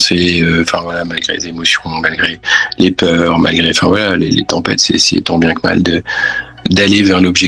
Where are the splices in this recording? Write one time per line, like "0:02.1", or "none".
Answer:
none